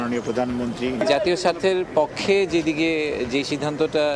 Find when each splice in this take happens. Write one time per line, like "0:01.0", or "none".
0:01.0